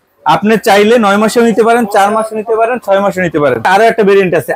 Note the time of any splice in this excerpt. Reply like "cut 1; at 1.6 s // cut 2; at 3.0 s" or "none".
cut 1; at 3.6 s